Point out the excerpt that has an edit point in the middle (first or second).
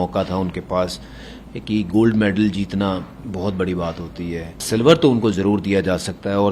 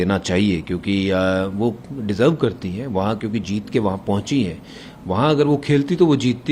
first